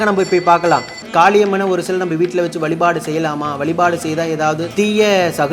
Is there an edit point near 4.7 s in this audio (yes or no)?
yes